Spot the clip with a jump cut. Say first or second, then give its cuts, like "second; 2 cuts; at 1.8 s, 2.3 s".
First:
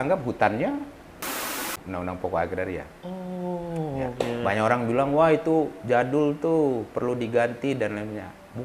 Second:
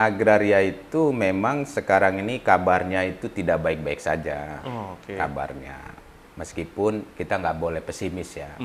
first; 1 cut; at 1.5 s